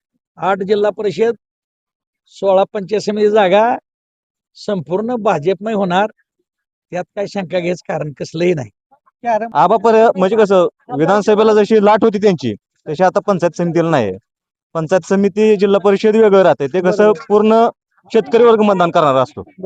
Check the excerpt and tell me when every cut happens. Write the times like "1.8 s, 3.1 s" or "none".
9.5 s

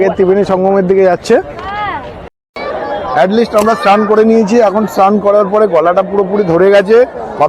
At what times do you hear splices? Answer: 2.4 s

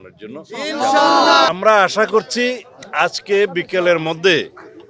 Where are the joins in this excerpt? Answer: 1.5 s

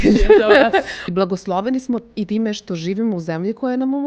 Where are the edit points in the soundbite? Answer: 1.0 s, 2.3 s

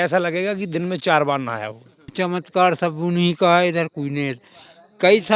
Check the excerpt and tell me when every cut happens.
2.1 s

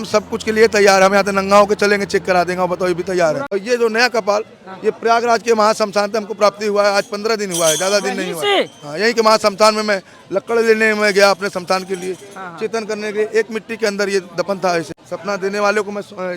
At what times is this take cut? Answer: 3.4 s, 15.0 s

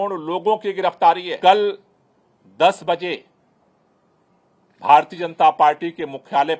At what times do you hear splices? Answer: 1.3 s

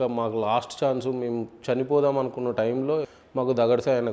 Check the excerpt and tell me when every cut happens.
3.0 s

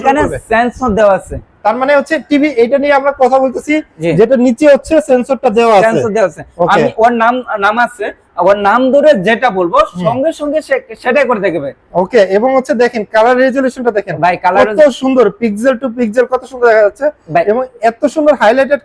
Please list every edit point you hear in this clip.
none

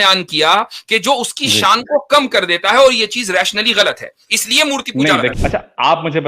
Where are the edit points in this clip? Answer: 5.3 s

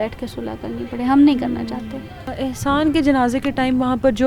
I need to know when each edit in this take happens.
2.4 s

